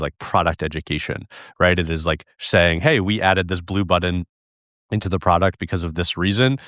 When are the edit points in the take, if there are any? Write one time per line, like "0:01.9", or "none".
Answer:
none